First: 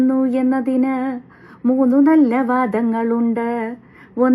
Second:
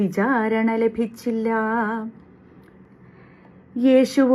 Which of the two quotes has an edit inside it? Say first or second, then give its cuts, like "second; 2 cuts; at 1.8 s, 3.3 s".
second; 1 cut; at 2.7 s